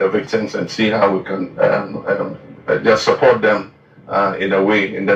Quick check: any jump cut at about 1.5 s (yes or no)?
yes